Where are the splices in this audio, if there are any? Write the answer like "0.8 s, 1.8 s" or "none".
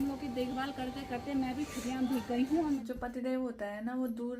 2.8 s